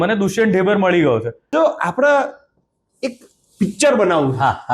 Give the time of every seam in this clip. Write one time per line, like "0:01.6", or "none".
0:01.4

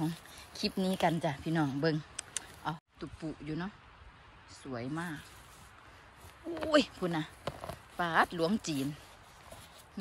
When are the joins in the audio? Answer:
0:02.8

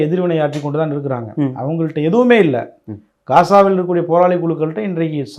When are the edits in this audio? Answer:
none

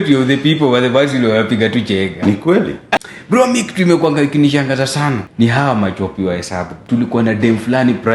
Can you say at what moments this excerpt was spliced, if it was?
0:02.9
0:05.3
0:06.8

